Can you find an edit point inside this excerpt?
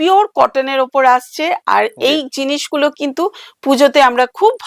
no; 0 cuts

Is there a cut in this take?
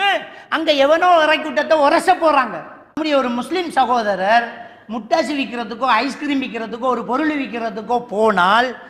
yes; 1 cut; at 3.0 s

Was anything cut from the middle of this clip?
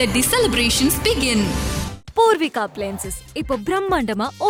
no; 0 cuts

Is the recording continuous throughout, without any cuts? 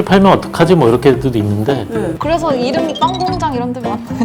no; 1 cut; at 2.2 s

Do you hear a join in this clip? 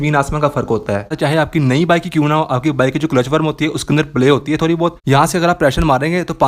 yes; 2 cuts; at 1.1 s, 5.0 s

